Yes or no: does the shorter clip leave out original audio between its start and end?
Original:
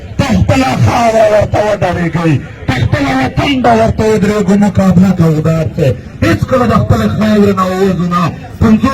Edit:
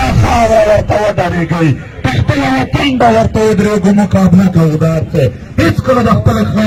no